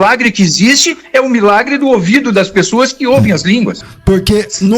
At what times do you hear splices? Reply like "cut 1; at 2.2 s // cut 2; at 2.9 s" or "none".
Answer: cut 1; at 3.8 s